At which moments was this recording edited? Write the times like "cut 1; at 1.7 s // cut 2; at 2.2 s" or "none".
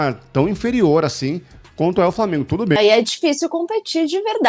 cut 1; at 2.8 s